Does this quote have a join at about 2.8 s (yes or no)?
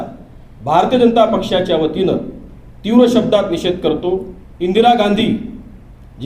no